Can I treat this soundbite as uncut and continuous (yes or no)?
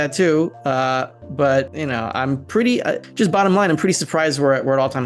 no